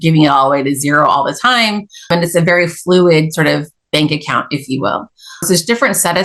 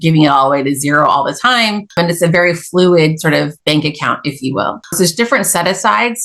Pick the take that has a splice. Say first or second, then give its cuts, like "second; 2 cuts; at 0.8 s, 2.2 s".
second; 3 cuts; at 1.8 s, 3.6 s, 4.8 s